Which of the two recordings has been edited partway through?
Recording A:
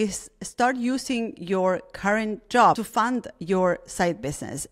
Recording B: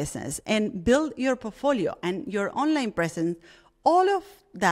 A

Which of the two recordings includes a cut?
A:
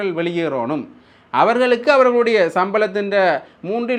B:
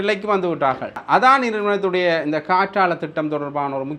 B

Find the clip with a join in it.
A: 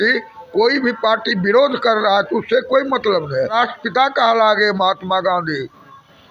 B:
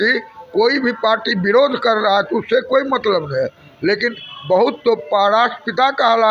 A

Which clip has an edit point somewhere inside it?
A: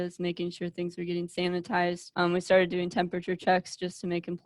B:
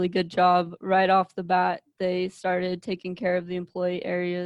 A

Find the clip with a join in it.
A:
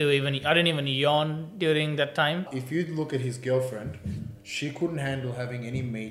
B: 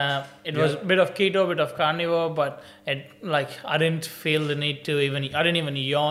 A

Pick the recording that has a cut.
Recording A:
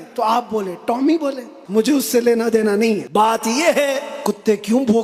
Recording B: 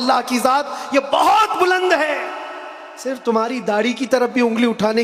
A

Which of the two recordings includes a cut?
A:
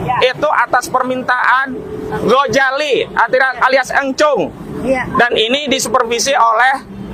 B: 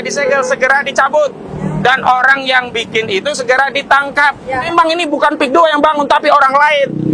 B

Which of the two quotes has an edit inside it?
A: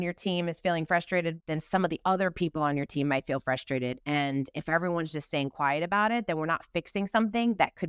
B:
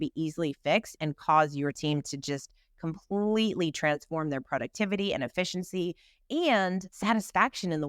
A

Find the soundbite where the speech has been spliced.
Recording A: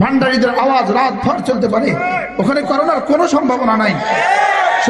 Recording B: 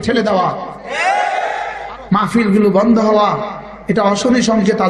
B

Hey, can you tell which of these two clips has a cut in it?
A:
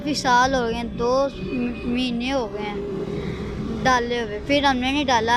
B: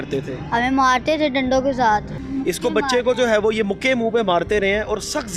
B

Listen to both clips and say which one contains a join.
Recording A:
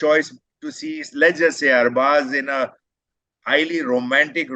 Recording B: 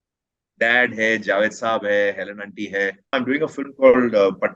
B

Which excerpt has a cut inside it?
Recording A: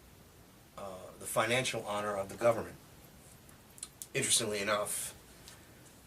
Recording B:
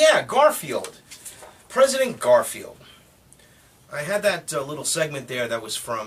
A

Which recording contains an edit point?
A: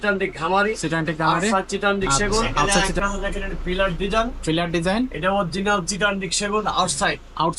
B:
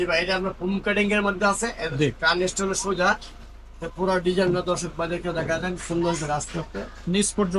A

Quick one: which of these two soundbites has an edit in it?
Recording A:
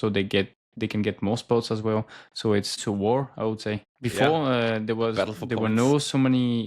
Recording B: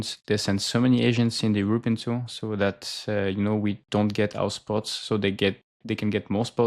A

